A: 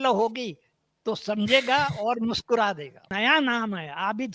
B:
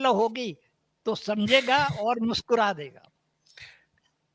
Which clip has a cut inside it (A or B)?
A